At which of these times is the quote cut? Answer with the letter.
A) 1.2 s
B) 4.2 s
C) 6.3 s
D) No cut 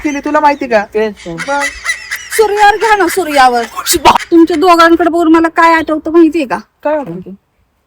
B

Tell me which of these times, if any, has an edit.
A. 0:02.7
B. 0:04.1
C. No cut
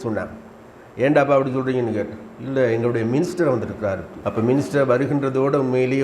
B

